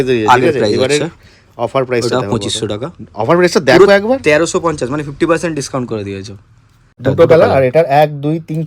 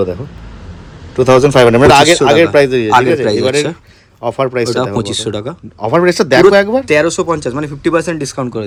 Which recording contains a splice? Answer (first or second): first